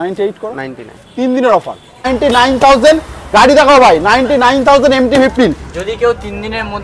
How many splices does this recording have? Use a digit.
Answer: 1